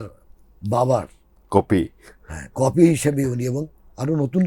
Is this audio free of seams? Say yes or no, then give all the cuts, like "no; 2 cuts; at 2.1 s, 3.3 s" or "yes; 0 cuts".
yes; 0 cuts